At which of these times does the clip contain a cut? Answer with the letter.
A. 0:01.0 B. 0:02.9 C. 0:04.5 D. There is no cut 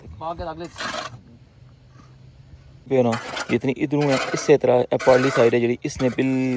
B